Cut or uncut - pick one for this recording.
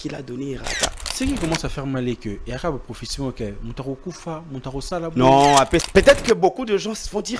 cut